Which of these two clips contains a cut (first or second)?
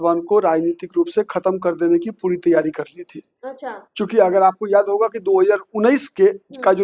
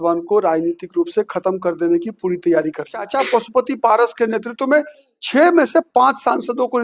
second